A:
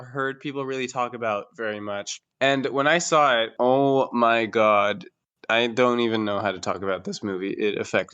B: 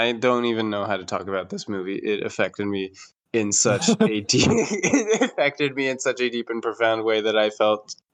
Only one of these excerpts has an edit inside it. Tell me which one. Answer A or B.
A